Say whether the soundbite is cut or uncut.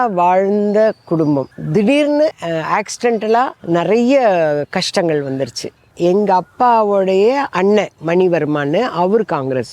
cut